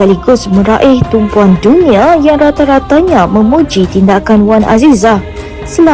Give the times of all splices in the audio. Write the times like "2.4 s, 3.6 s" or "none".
none

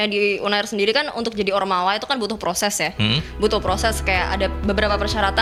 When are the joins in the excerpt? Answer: none

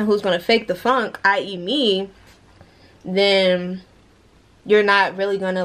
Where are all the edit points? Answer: none

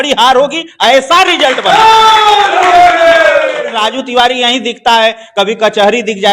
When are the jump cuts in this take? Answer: 3.8 s

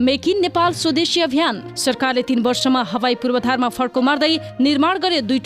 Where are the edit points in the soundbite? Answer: 1.7 s

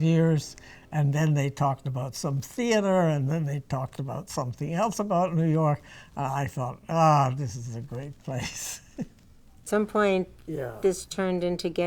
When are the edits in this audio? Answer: 9.7 s

